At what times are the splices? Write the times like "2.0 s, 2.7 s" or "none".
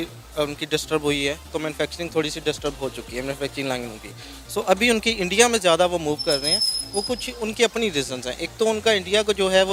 none